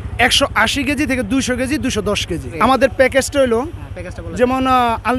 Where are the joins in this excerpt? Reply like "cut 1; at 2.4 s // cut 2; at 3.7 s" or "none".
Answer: cut 1; at 2.5 s